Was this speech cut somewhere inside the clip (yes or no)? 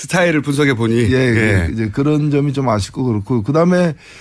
yes